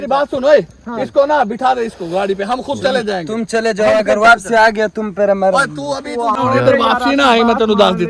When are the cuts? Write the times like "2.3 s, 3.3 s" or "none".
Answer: 6.4 s